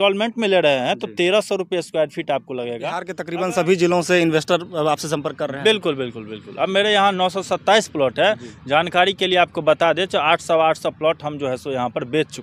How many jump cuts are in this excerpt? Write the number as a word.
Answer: one